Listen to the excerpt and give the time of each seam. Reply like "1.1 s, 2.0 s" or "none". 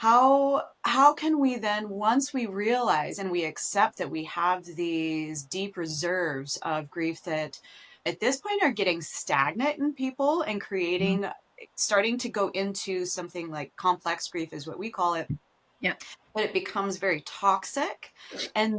8.0 s